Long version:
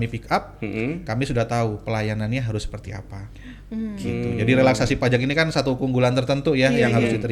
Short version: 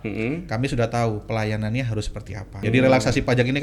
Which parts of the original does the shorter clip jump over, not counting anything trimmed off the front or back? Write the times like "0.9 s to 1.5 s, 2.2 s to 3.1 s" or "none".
3.2 s to 4.4 s